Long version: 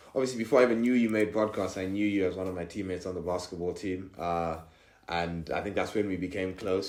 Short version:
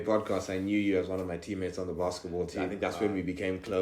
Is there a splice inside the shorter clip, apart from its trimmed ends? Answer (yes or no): yes